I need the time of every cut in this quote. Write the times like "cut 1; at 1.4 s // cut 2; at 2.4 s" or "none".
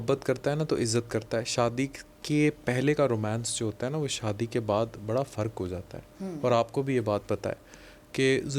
none

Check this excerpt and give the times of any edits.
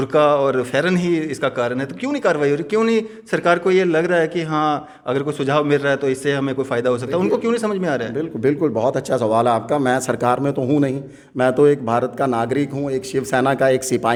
none

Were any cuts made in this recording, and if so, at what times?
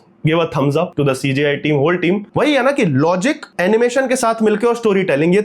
cut 1; at 0.9 s // cut 2; at 2.3 s // cut 3; at 3.5 s

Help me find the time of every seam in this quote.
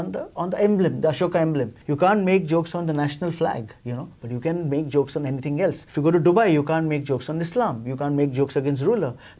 cut 1; at 1.8 s // cut 2; at 5.8 s

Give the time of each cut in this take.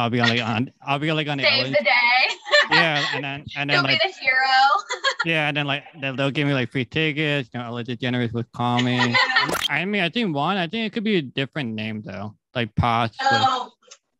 cut 1; at 9.5 s

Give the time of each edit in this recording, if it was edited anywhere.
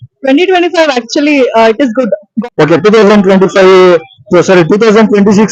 cut 1; at 2.3 s

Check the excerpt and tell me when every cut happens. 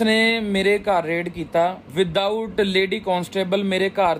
none

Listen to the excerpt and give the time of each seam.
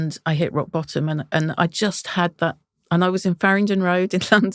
none

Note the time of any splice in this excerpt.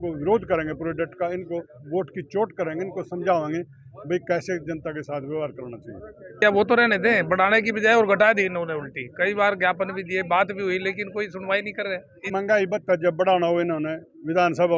cut 1; at 6.4 s // cut 2; at 12.3 s

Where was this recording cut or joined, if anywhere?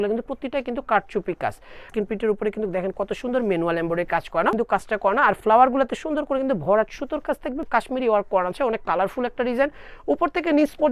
cut 1; at 1.8 s // cut 2; at 4.6 s // cut 3; at 7.6 s

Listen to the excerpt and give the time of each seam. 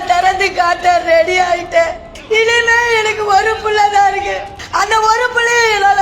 cut 1; at 2.1 s // cut 2; at 4.5 s

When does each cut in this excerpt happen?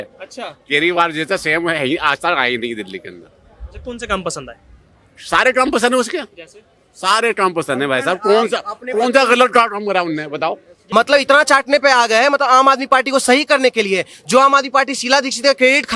cut 1; at 10.8 s

